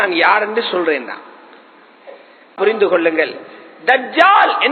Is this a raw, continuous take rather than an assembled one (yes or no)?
no